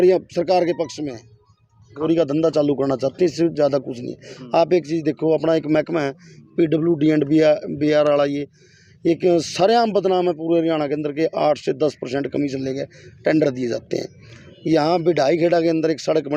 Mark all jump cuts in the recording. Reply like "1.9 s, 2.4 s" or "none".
2.0 s